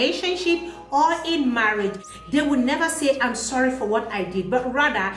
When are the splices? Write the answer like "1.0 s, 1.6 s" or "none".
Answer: 2.0 s